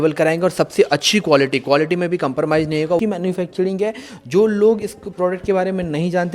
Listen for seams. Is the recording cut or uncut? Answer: cut